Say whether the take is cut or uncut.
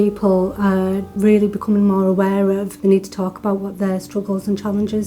cut